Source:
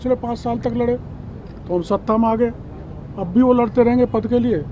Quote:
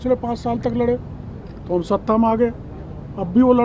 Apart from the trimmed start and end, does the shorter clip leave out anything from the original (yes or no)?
no